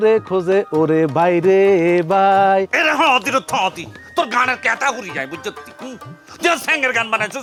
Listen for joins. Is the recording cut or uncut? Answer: uncut